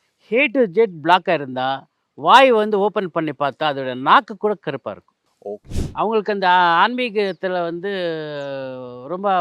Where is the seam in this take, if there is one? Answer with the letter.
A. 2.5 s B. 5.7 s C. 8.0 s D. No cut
B